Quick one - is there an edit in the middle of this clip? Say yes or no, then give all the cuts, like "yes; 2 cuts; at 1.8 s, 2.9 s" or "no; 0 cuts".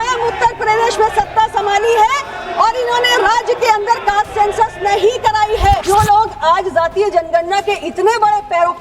yes; 1 cut; at 5.8 s